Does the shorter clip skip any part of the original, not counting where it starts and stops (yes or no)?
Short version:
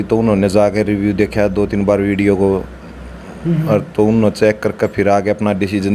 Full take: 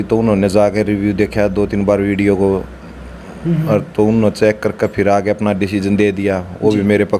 no